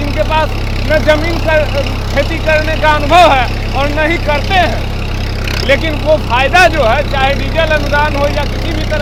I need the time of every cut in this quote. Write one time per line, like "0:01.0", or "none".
none